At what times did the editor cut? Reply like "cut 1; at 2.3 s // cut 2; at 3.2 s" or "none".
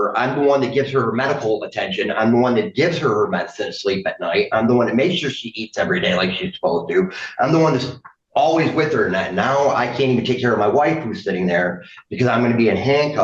none